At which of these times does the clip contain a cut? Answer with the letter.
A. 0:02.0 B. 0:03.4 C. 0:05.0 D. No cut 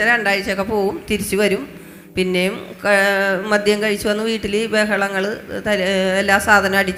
D